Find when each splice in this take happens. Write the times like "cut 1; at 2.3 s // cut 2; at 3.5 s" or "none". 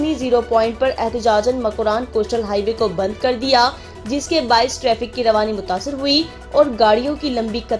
none